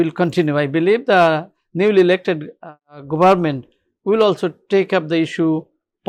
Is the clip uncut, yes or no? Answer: yes